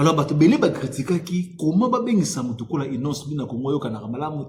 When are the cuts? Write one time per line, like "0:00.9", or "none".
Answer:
none